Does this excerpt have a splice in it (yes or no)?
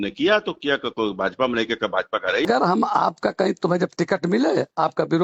yes